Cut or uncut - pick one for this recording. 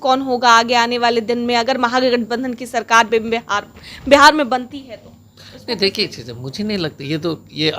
uncut